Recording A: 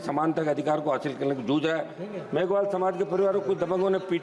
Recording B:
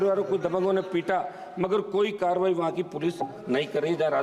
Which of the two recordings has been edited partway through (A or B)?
A